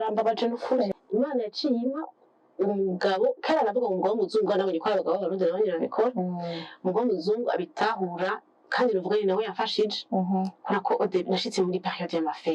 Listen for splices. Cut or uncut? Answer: cut